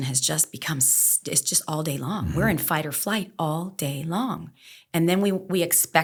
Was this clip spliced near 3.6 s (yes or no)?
no